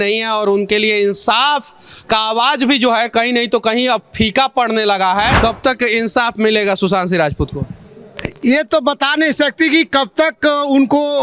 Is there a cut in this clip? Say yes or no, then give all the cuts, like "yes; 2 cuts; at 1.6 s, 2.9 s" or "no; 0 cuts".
yes; 1 cut; at 5.4 s